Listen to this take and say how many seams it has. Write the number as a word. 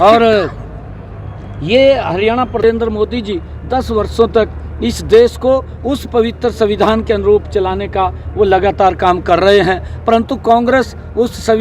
one